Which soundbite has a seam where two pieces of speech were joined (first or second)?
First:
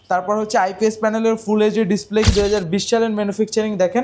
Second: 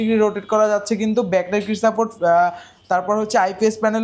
first